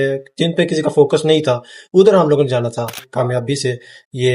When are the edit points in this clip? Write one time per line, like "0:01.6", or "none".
0:03.0